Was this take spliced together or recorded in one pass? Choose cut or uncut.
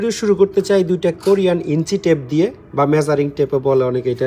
uncut